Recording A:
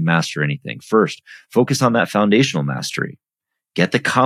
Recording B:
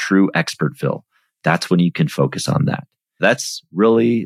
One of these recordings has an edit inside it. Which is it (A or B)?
B